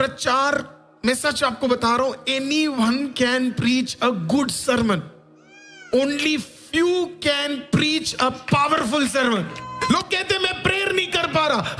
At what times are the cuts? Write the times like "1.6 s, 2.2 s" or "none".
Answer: 9.6 s

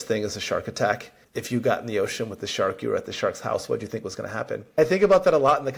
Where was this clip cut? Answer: 4.8 s

